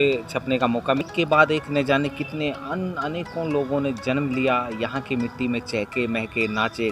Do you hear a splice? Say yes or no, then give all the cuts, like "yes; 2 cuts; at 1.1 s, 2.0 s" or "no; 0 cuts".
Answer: yes; 1 cut; at 1.0 s